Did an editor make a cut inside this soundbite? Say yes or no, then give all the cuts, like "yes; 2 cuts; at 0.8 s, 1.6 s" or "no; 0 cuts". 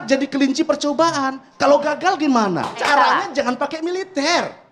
yes; 1 cut; at 2.8 s